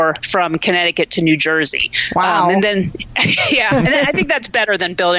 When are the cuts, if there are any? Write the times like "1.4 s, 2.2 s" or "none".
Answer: none